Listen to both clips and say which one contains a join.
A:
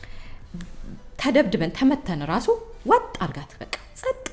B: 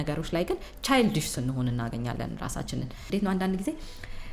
B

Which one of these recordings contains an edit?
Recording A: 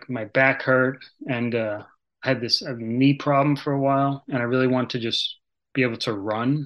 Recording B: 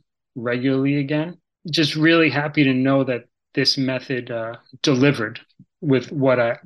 B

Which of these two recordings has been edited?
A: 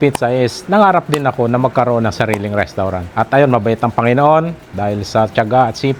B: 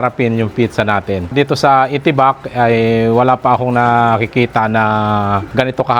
B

